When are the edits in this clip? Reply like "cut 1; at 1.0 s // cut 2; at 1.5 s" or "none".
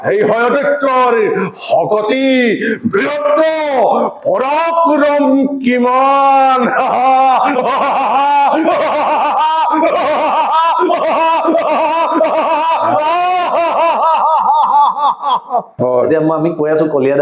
cut 1; at 15.7 s